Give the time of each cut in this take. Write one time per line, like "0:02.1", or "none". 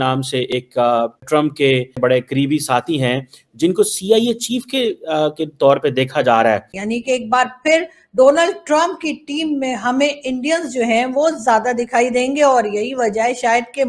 0:06.7

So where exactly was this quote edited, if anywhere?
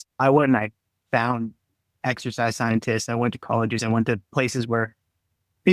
none

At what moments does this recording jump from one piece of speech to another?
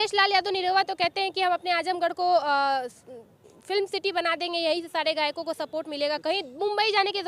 none

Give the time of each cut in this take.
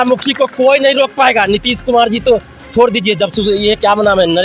none

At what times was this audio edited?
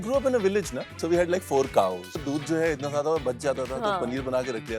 0:00.9
0:02.2

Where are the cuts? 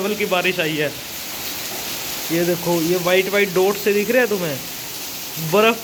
none

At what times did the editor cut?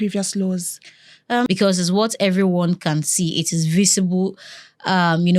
0:01.5

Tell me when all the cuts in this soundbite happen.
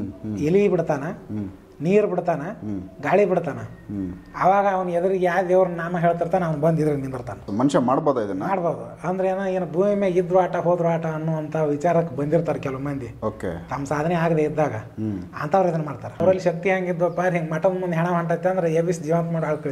0:07.5
0:16.2

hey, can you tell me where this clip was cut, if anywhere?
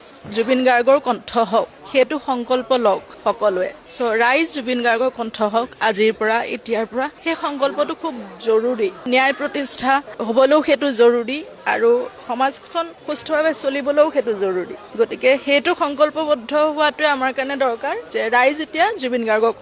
none

